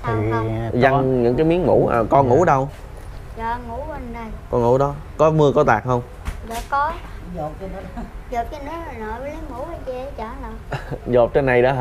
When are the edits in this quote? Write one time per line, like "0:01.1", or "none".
none